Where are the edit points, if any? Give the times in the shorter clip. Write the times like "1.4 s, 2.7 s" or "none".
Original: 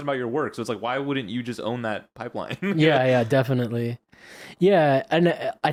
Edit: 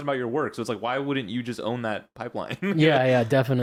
none